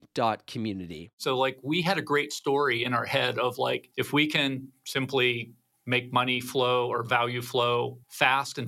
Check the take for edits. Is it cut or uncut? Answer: cut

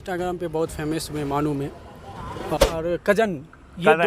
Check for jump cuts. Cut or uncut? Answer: cut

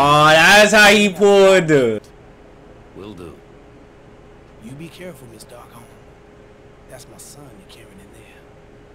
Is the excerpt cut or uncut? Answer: cut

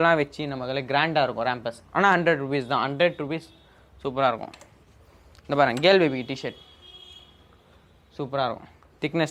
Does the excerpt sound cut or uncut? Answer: uncut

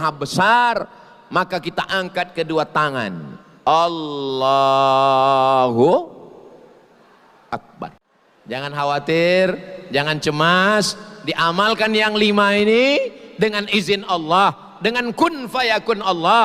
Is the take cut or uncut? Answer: cut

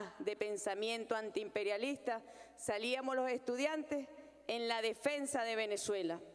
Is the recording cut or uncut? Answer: uncut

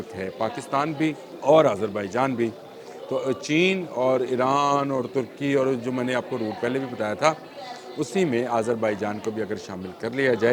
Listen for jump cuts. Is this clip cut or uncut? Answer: cut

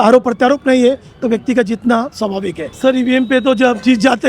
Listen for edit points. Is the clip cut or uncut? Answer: cut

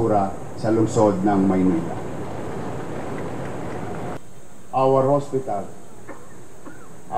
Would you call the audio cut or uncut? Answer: cut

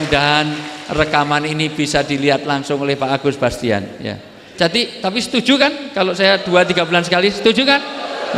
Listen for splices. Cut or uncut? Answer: uncut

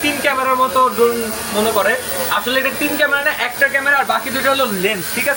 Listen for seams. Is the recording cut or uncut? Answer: uncut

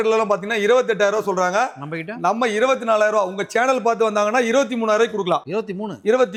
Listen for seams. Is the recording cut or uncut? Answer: uncut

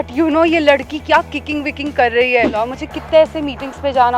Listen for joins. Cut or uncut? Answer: cut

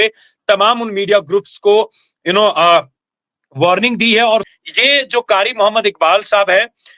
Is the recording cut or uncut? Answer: cut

